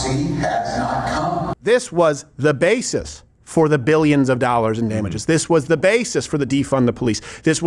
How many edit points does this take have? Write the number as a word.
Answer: one